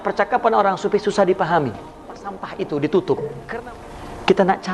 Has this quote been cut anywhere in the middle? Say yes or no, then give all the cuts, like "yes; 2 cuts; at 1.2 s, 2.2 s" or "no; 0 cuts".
yes; 1 cut; at 2.4 s